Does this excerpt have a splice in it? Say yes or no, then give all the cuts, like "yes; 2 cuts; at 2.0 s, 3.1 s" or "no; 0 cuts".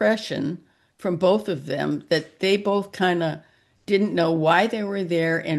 no; 0 cuts